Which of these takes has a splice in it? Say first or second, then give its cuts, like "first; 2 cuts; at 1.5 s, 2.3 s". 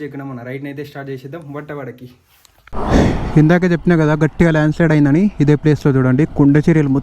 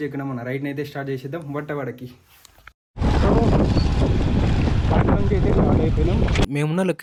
first; 1 cut; at 2.8 s